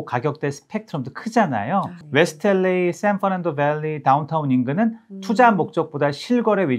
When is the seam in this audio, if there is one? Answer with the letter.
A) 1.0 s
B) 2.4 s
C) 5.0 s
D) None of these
D